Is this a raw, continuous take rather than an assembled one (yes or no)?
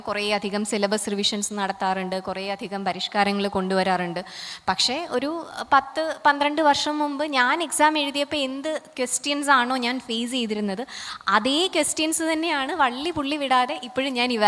yes